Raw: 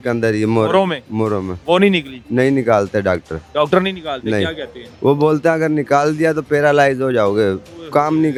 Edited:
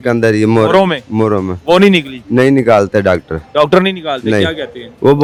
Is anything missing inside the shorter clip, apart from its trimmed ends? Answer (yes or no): no